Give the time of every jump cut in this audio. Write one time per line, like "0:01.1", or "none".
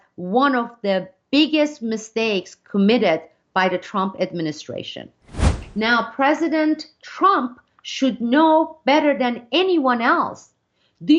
0:05.4